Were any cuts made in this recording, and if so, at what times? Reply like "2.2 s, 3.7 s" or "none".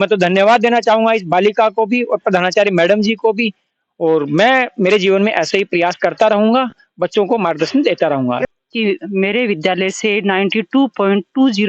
8.4 s